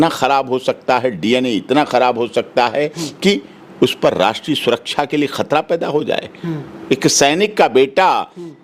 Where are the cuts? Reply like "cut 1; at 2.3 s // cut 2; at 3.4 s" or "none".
none